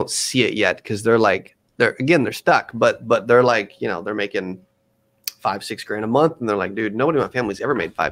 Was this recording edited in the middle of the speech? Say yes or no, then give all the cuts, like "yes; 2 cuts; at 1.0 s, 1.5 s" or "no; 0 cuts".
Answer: no; 0 cuts